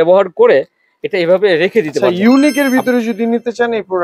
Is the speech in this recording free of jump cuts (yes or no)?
no